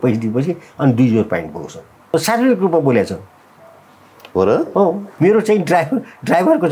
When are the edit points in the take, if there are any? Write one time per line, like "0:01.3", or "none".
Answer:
0:02.1
0:05.1

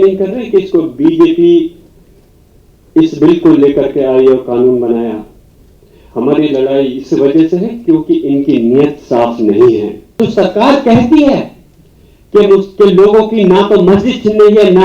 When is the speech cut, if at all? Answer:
0:10.2

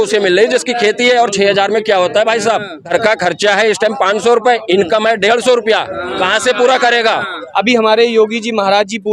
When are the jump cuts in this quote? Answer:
0:02.9
0:07.4

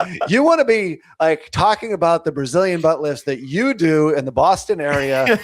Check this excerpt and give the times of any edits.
none

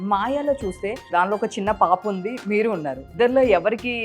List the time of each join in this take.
0:01.0
0:03.1

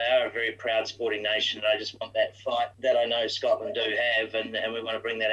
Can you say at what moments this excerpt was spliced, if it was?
0:02.7

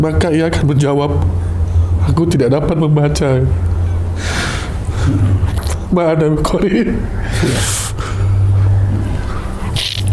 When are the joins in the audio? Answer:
none

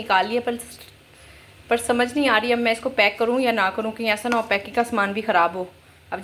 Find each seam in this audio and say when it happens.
none

